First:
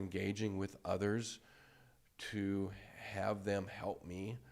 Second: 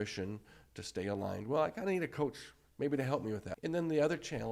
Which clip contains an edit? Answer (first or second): second